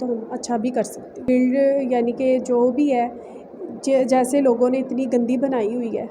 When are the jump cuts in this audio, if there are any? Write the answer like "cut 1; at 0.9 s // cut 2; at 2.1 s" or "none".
cut 1; at 1.3 s